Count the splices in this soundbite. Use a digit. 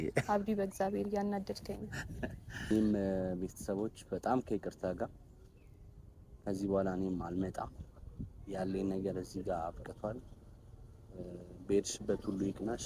1